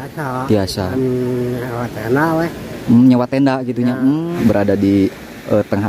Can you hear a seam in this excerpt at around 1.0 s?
no; 1 cut; at 4.3 s

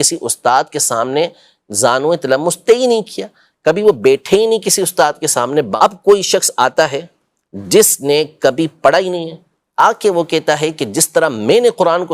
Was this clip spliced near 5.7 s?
yes; 1 cut; at 5.7 s

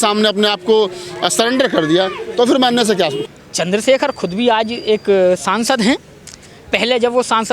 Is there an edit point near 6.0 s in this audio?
no; 1 cut; at 3.3 s

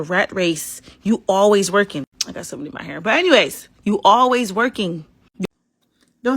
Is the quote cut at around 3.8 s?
no; 1 cut; at 5.3 s

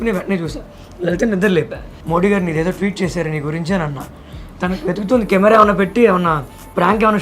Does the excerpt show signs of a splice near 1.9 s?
yes; 2 cuts; at 1.9 s, 4.4 s

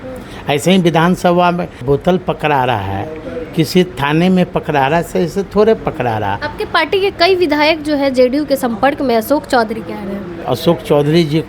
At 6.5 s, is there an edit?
yes; 3 cuts; at 1.8 s, 6.5 s, 10.3 s

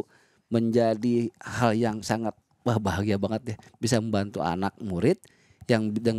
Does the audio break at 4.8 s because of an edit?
no; 0 cuts

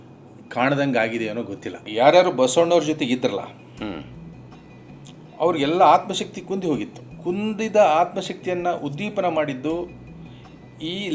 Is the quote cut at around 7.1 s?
yes; 2 cuts; at 1.8 s, 7.1 s

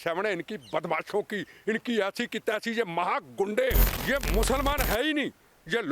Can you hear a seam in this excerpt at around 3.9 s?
yes; 1 cut; at 3.9 s

